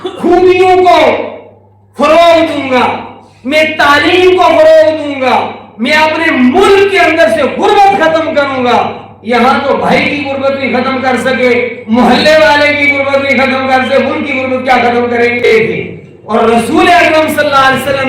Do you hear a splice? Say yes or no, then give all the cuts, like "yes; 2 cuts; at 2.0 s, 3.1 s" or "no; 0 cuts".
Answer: yes; 1 cut; at 15.4 s